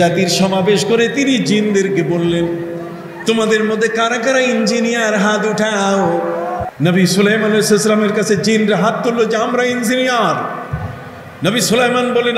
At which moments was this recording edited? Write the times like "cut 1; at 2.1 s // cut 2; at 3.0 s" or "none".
cut 1; at 6.7 s